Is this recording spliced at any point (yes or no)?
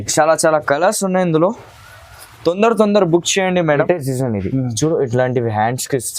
yes